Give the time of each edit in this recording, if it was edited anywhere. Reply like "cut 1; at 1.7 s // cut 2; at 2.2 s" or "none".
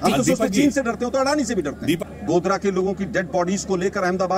cut 1; at 2.1 s